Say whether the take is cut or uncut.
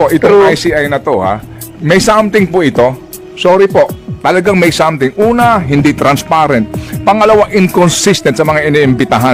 uncut